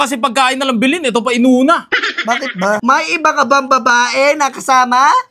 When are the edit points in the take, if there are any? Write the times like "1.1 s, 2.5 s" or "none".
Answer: 2.8 s